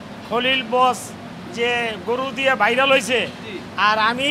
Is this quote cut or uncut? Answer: uncut